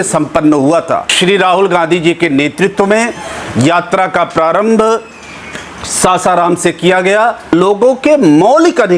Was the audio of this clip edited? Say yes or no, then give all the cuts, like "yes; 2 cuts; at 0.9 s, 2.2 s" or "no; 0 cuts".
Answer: yes; 2 cuts; at 1.0 s, 7.5 s